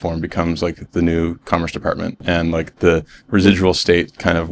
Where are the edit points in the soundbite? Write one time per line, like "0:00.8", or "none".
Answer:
0:02.2